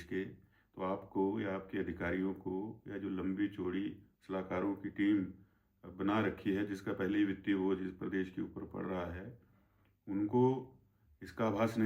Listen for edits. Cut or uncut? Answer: uncut